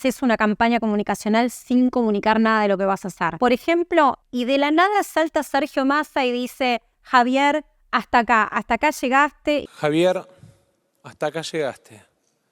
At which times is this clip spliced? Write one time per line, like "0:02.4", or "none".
0:03.2
0:04.2
0:09.7